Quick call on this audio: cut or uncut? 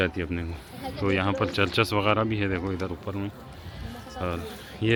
uncut